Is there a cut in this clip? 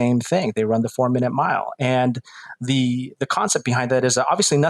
no; 0 cuts

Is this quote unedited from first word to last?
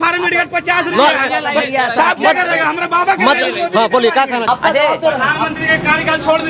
no; 1 cut; at 4.4 s

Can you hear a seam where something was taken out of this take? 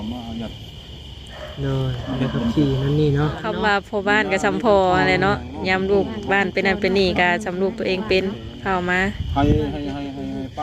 yes; 1 cut; at 3.6 s

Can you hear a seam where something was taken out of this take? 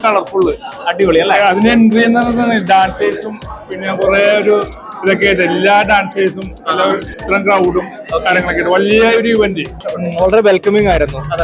yes; 1 cut; at 9.7 s

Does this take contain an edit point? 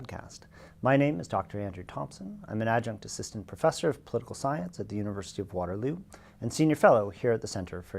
yes; 1 cut; at 1.1 s

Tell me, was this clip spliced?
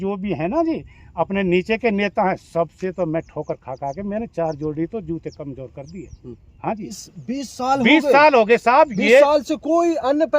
yes; 1 cut; at 7.0 s

